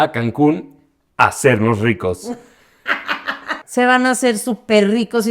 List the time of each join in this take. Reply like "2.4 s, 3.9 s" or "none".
3.5 s